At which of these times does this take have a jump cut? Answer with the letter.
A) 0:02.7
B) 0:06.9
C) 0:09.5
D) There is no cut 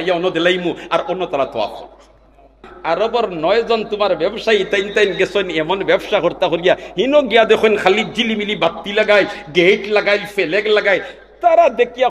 A